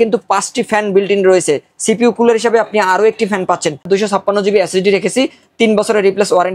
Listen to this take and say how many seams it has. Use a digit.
1